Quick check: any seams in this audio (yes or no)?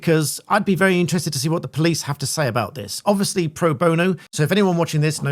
yes